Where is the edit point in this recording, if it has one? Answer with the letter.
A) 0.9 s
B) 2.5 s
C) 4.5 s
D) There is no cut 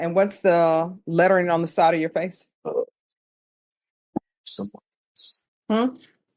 B